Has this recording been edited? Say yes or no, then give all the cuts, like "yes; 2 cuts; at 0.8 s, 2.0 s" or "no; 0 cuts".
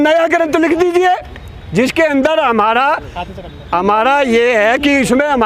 no; 0 cuts